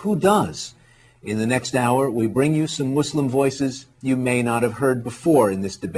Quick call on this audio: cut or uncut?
uncut